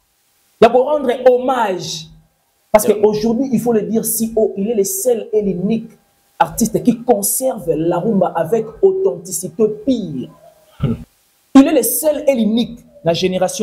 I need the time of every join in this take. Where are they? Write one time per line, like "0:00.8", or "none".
0:11.0